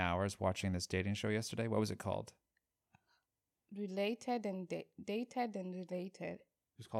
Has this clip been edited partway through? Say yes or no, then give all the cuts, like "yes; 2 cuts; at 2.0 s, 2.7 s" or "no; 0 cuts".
no; 0 cuts